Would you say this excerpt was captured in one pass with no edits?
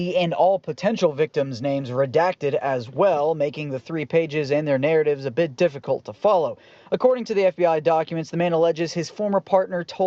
no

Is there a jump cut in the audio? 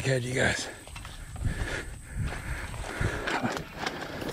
no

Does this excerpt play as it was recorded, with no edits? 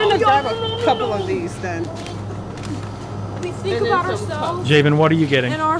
no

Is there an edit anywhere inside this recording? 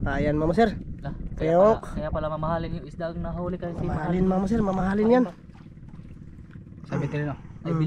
no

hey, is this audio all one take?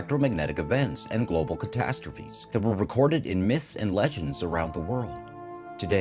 yes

